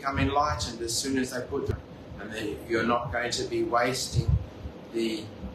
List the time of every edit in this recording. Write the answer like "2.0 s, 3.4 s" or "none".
1.7 s